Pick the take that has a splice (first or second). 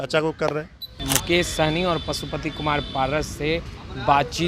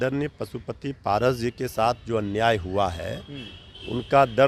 first